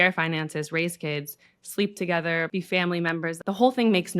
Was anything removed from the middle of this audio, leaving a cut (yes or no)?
yes